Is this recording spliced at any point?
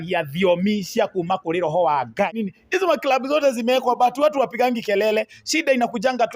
yes; 1 cut; at 2.5 s

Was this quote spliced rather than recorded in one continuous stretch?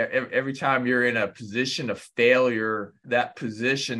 yes; 1 cut; at 3.0 s

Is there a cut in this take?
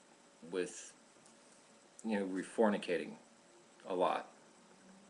no; 0 cuts

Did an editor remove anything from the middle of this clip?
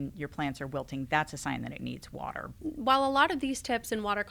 yes; 1 cut; at 2.5 s

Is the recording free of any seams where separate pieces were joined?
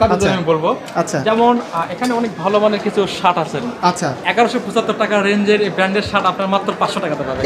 yes; 0 cuts

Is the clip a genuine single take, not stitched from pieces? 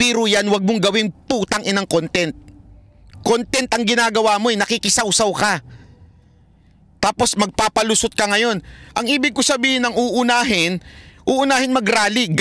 yes; 0 cuts

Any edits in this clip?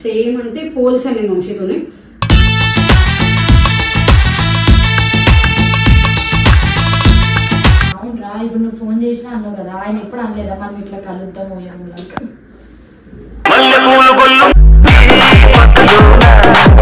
yes; 1 cut; at 7.9 s

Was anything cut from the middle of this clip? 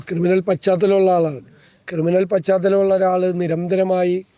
no; 0 cuts

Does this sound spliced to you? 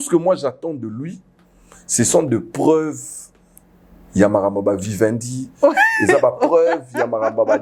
no; 0 cuts

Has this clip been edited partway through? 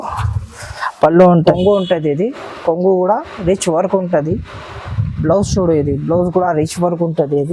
yes; 1 cut; at 1.5 s

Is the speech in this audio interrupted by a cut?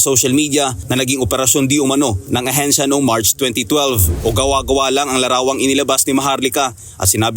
yes; 1 cut; at 4.1 s

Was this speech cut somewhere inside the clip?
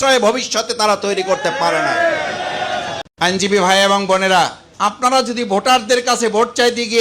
yes; 2 cuts; at 3.0 s, 4.6 s

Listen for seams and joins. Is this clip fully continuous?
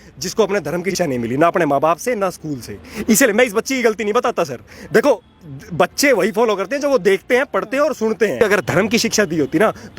no; 2 cuts; at 0.9 s, 8.4 s

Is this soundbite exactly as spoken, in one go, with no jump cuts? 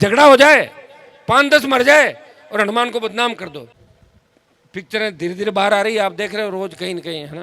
no; 1 cut; at 3.6 s

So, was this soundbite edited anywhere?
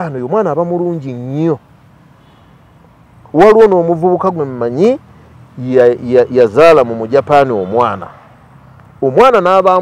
no; 0 cuts

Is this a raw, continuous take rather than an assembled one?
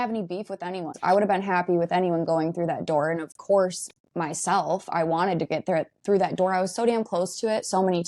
no; 1 cut; at 1.0 s

